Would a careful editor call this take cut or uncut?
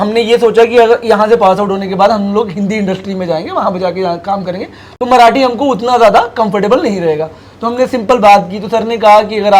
uncut